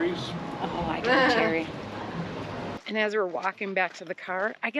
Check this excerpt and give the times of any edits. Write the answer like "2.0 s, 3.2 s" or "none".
2.7 s